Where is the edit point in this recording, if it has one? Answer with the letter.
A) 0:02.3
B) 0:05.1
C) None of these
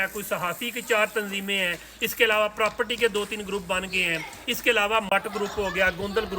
B